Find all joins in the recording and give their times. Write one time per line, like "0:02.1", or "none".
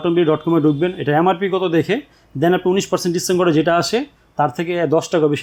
none